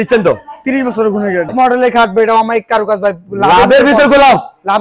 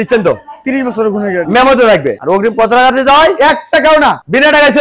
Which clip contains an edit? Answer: first; 1 cut; at 1.5 s

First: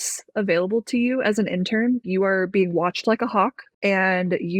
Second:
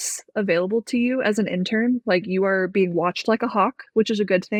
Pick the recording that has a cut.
first; 2 cuts; at 2.0 s, 3.7 s

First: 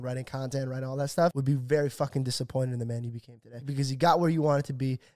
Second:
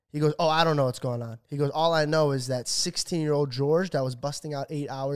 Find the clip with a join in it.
first; 2 cuts; at 1.4 s, 3.7 s

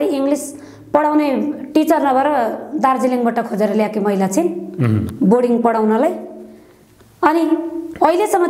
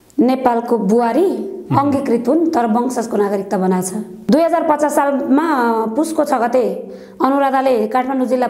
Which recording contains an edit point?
second; 1 cut; at 4.1 s

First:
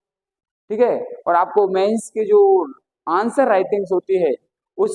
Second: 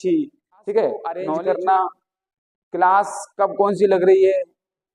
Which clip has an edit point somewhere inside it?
second; 1 cut; at 1.1 s

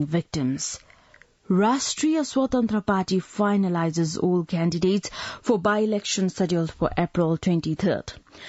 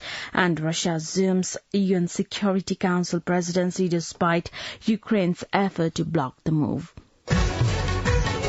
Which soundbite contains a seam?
second; 1 cut; at 7.1 s

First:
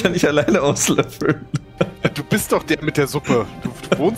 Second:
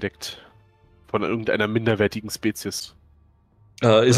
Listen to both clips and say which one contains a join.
second; 1 cut; at 2.8 s

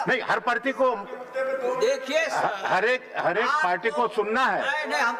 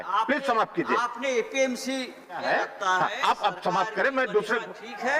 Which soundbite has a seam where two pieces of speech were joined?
second; 1 cut; at 2.4 s

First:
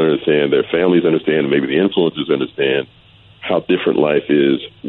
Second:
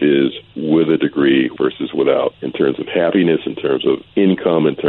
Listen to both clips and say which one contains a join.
second; 3 cuts; at 1.5 s, 2.4 s, 4.1 s

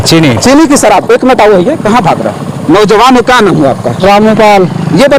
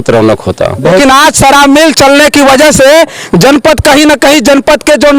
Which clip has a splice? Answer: second; 1 cut; at 1.0 s

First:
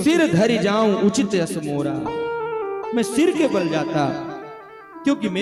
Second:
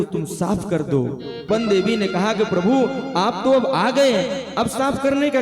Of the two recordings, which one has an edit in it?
second; 1 cut; at 1.5 s

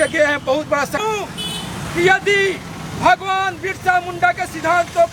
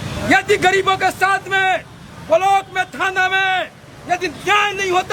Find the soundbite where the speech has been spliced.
first; 1 cut; at 1.0 s

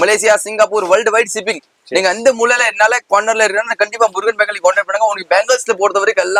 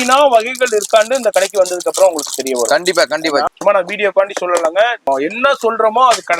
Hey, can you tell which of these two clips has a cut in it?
second; 2 cuts; at 3.5 s, 5.0 s

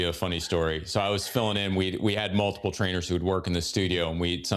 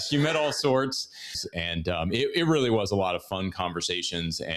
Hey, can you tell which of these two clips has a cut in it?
second; 1 cut; at 1.4 s

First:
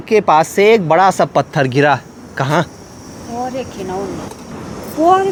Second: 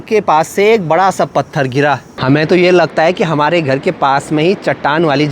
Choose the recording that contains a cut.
second; 1 cut; at 2.1 s

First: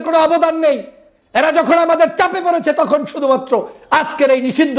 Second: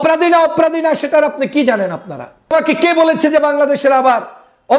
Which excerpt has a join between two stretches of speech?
second; 1 cut; at 2.5 s

